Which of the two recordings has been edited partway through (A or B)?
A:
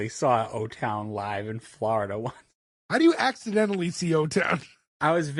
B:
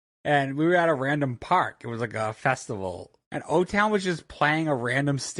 B